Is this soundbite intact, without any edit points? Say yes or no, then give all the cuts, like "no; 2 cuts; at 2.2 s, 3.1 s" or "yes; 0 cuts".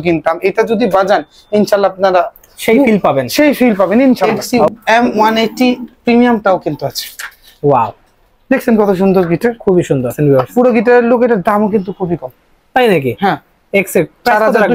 no; 2 cuts; at 4.5 s, 10.2 s